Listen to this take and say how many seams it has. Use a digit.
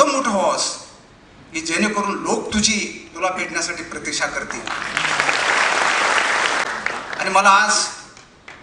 1